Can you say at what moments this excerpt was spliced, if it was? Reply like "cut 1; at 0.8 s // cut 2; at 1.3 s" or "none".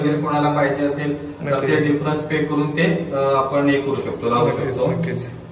none